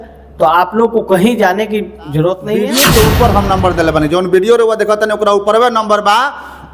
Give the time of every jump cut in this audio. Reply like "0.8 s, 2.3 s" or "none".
2.6 s